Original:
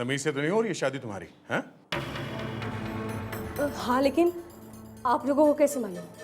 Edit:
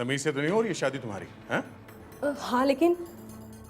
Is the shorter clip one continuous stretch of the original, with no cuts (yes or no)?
no